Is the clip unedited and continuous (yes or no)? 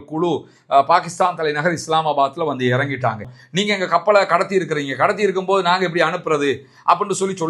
no